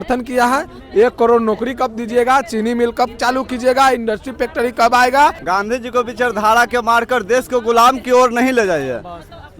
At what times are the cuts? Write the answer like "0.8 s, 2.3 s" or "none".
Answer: 5.4 s